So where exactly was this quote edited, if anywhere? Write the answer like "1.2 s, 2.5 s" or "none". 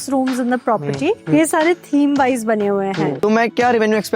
1.2 s, 3.2 s

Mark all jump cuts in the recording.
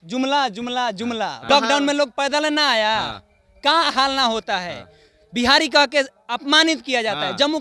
1.4 s

